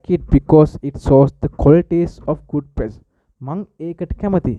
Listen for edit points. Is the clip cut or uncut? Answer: uncut